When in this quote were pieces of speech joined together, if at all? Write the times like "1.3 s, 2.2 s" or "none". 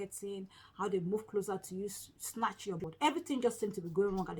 2.8 s